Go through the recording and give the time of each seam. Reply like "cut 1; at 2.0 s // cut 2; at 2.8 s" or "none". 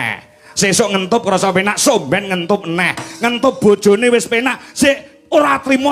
none